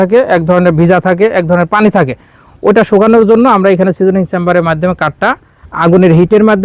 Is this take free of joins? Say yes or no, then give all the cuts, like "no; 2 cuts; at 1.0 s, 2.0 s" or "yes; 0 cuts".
yes; 0 cuts